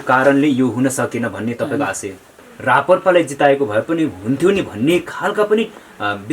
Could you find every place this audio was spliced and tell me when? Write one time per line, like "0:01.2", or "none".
0:02.5